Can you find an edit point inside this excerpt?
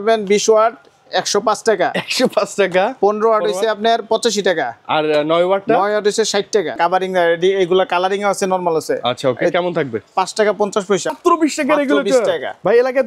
yes; 2 cuts; at 6.8 s, 11.1 s

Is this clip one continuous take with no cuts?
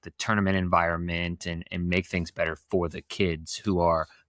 yes; 0 cuts

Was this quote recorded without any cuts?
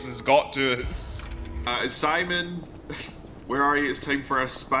no; 1 cut; at 1.7 s

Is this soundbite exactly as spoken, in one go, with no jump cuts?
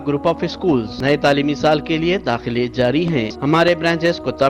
no; 2 cuts; at 0.9 s, 3.3 s

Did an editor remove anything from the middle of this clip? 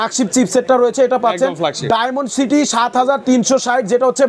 no; 0 cuts

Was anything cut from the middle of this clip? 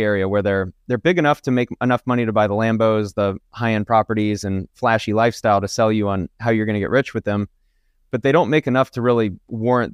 no; 0 cuts

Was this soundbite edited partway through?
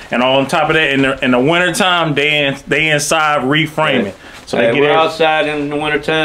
no; 0 cuts

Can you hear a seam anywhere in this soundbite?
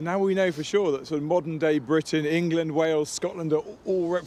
no; 0 cuts

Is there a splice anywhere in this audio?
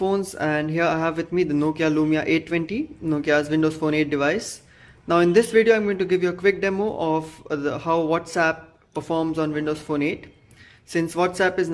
yes; 1 cut; at 8.0 s

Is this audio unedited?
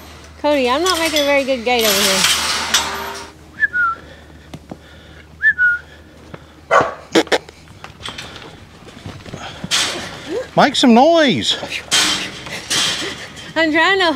no; 1 cut; at 3.2 s

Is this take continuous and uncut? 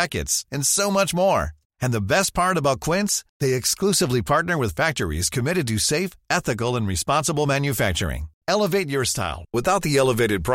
yes; 0 cuts

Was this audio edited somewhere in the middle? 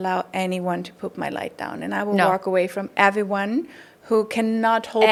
no; 0 cuts

